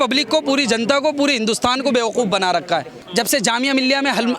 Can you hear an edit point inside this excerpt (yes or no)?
yes